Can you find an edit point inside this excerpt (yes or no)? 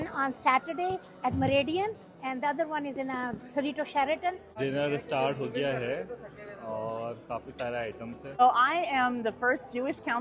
yes